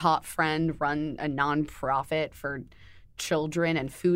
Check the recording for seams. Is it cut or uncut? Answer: uncut